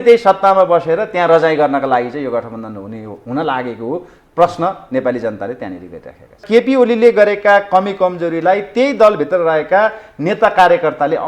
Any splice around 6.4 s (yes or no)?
yes